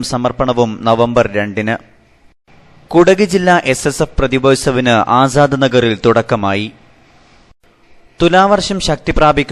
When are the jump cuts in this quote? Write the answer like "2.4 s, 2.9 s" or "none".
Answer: 7.5 s